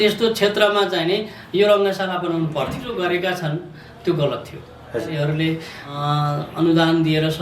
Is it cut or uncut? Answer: cut